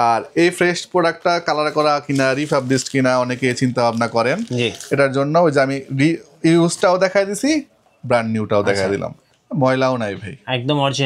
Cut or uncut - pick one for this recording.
uncut